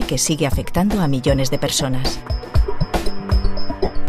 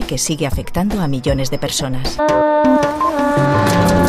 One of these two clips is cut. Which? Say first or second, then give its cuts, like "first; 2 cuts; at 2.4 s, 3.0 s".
first; 1 cut; at 2.2 s